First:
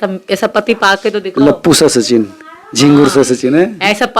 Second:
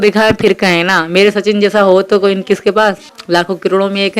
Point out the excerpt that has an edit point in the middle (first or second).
second